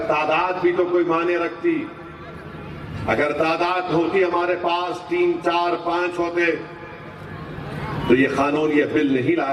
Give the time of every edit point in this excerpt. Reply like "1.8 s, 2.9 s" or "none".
none

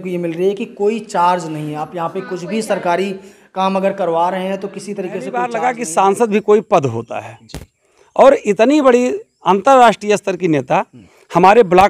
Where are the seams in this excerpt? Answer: 5.5 s

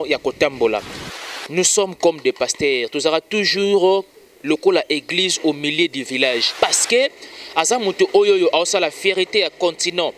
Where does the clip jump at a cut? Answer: 1.1 s, 6.5 s

